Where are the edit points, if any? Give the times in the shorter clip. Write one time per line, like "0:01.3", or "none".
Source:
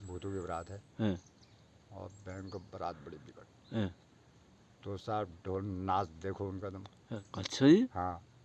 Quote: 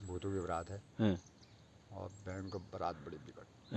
none